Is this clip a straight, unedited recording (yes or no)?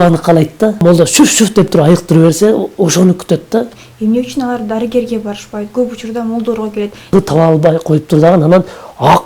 no